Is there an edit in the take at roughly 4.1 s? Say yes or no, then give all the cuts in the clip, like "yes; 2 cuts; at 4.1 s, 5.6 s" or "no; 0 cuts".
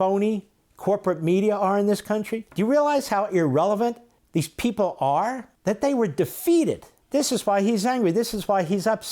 yes; 4 cuts; at 2.4 s, 4.1 s, 5.5 s, 6.9 s